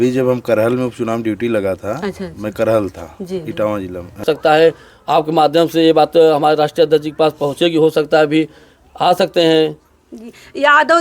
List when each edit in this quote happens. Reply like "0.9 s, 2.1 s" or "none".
4.2 s